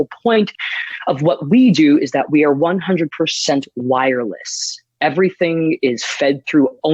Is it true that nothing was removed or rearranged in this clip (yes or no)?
yes